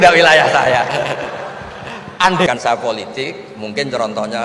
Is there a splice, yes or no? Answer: yes